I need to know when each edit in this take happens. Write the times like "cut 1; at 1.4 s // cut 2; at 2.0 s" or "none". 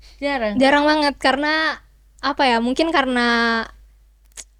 none